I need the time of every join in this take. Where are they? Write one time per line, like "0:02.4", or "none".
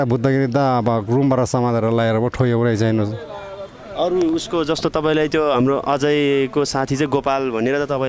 none